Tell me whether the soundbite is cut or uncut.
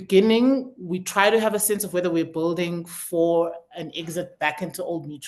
uncut